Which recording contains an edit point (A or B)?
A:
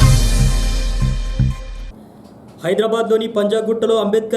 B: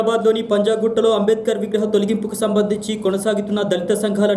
A